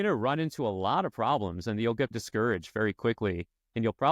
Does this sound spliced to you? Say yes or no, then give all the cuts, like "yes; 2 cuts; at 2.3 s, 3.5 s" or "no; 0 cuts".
yes; 1 cut; at 2.1 s